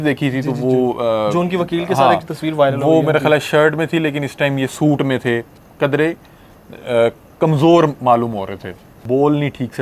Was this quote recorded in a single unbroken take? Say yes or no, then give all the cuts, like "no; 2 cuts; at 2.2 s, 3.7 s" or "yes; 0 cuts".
no; 2 cuts; at 5.6 s, 9.0 s